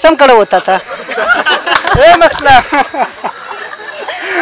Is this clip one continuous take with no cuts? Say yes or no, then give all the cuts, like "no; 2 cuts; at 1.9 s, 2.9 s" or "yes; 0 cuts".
yes; 0 cuts